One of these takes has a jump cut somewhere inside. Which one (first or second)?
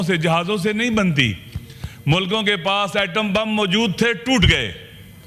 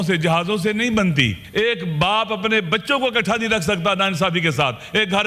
second